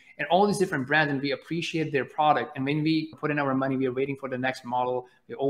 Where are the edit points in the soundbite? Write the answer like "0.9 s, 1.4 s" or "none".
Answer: 3.1 s